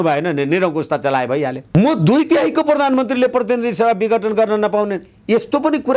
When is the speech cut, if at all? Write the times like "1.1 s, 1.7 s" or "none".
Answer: 1.6 s